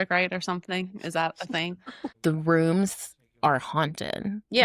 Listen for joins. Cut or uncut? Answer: cut